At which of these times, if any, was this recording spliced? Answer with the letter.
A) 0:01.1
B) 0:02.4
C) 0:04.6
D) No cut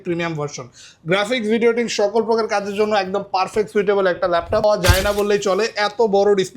C